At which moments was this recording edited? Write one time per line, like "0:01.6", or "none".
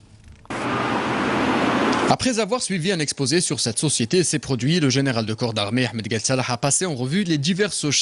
0:02.6